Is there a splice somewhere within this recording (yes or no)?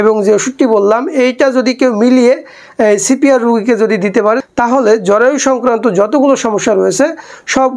no